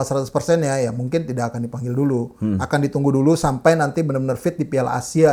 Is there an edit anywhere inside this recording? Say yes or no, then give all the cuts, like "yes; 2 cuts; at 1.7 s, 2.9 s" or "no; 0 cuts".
no; 0 cuts